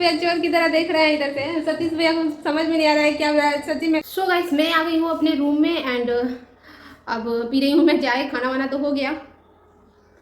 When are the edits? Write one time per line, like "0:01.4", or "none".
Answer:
0:04.1